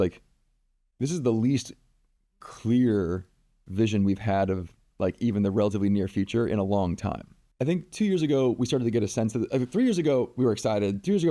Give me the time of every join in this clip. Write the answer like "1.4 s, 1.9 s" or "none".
7.4 s